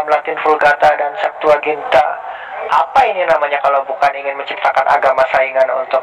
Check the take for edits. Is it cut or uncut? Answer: uncut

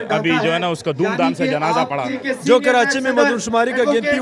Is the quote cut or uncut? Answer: cut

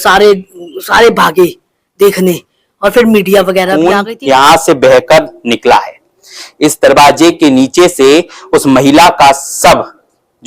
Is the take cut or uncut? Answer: cut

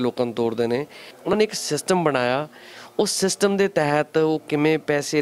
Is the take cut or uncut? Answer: cut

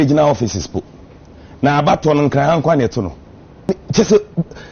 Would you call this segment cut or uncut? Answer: cut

